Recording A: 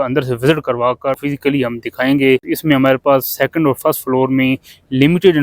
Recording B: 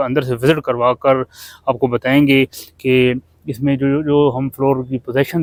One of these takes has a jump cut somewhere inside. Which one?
A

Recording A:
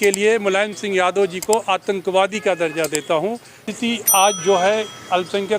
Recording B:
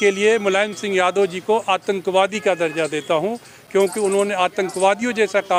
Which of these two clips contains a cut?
A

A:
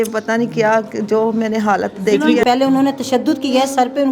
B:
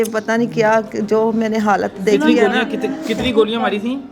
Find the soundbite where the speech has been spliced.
A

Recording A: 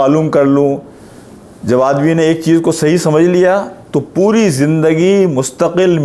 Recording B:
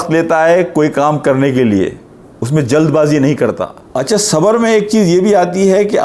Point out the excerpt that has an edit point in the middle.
B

